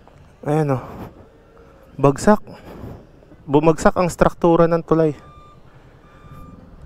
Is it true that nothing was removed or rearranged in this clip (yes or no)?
yes